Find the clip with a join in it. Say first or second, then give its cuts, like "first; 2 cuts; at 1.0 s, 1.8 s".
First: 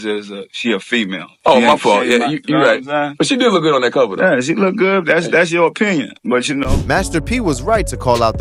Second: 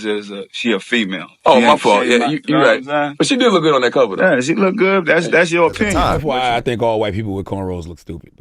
second; 1 cut; at 5.9 s